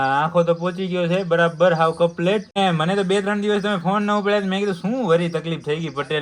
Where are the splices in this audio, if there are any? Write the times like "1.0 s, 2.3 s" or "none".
2.6 s